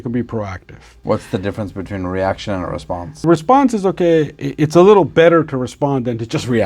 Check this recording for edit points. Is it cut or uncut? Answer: cut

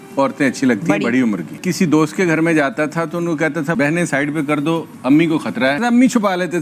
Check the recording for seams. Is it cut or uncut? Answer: uncut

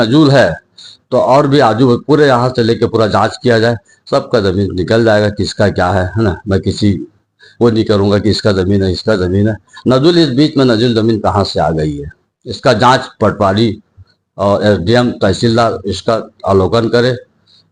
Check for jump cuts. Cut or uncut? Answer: uncut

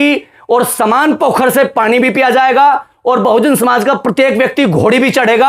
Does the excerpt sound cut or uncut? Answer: uncut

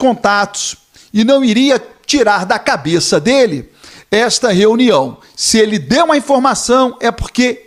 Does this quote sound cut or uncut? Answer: uncut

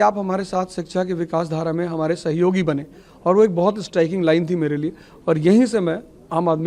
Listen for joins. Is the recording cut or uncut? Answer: uncut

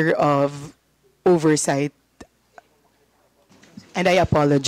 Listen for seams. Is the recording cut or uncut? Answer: uncut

